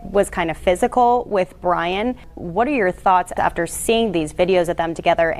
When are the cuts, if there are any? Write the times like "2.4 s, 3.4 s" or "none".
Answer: 2.4 s, 3.3 s